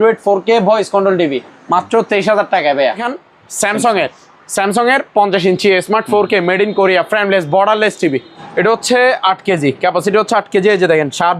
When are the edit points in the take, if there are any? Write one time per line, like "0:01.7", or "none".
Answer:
0:03.1
0:08.4